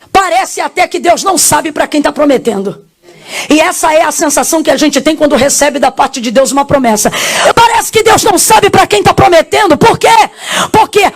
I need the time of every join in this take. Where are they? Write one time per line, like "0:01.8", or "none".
0:07.5